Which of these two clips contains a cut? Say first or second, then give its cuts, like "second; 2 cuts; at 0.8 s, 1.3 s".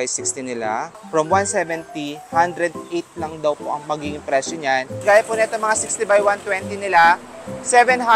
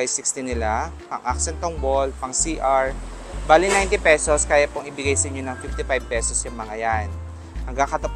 first; 2 cuts; at 1.0 s, 4.9 s